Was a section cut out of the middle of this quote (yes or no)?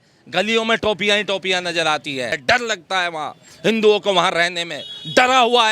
yes